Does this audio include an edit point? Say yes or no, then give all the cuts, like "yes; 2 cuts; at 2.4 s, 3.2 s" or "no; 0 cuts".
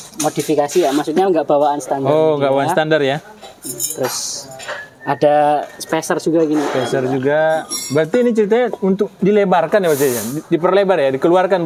no; 0 cuts